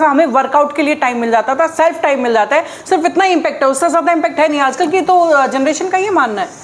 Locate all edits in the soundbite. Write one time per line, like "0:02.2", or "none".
none